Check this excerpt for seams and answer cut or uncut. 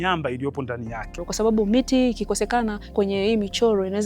cut